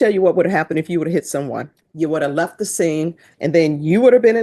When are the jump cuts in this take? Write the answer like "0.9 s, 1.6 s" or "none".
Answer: 1.8 s, 3.3 s